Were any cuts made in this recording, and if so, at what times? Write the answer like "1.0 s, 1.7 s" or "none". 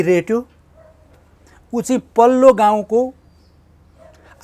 none